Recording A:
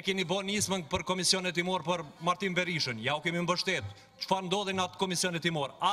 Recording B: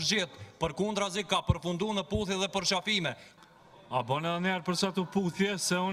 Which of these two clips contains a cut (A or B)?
B